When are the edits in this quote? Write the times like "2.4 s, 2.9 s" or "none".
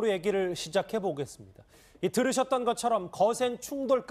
2.6 s